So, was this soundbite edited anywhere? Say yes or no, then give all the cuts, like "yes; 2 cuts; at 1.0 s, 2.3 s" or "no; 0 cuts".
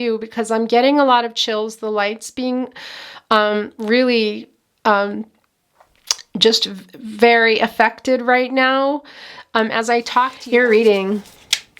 yes; 1 cut; at 10.4 s